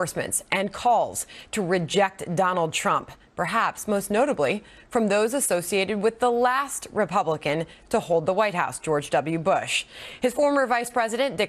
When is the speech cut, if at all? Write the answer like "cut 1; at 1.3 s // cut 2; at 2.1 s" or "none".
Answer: cut 1; at 3.4 s